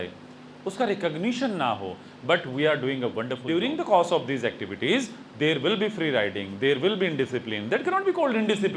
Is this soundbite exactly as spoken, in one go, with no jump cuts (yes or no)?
no